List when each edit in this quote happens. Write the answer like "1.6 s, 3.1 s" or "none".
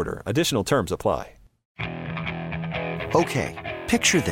1.6 s